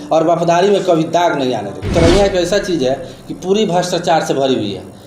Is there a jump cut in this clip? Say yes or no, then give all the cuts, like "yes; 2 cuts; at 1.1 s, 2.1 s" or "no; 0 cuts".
yes; 1 cut; at 1.9 s